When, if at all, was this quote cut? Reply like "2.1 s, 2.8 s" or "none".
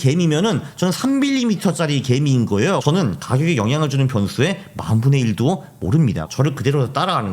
2.8 s, 6.2 s